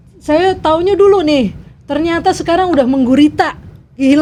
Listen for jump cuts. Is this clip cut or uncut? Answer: uncut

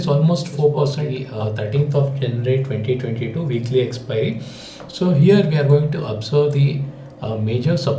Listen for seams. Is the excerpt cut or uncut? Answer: cut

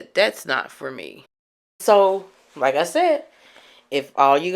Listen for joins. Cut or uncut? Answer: cut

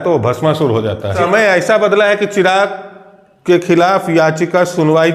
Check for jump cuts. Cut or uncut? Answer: cut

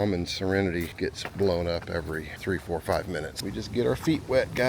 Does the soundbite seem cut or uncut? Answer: cut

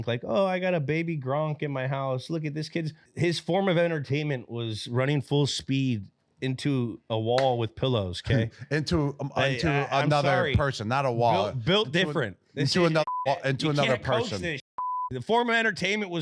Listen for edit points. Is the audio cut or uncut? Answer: cut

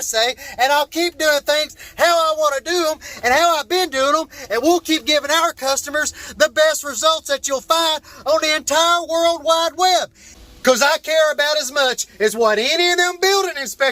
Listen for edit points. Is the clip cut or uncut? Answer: cut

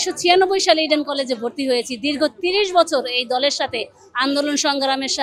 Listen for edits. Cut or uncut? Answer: uncut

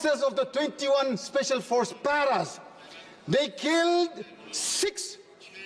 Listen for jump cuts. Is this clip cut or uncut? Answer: uncut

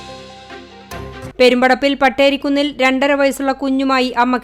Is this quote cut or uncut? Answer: cut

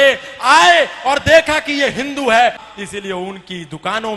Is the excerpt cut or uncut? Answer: cut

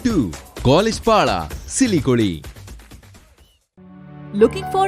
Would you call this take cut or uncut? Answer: uncut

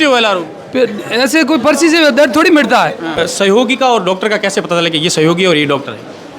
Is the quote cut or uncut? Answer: cut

